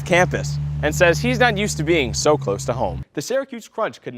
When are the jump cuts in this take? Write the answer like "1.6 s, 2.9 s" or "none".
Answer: 2.9 s

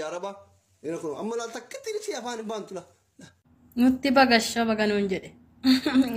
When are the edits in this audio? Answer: none

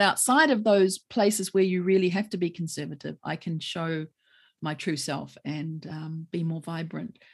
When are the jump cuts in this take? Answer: none

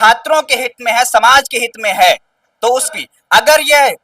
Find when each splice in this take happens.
2.9 s

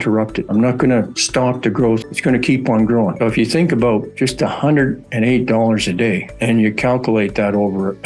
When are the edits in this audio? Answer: 2.0 s

